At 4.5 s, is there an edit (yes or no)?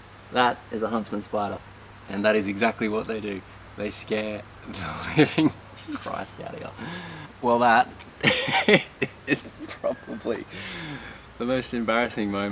no